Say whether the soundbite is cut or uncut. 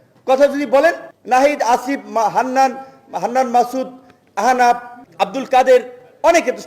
cut